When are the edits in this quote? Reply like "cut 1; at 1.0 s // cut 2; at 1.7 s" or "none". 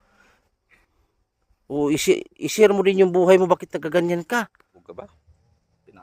cut 1; at 4.8 s